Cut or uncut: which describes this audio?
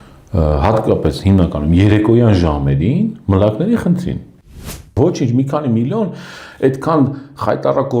cut